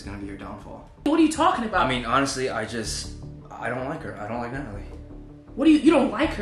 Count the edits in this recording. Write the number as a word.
zero